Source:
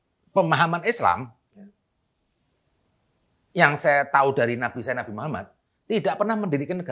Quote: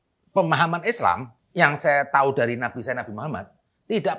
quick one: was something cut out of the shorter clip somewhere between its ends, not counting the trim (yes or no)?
yes